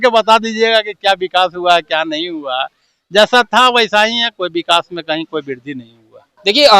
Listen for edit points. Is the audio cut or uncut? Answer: uncut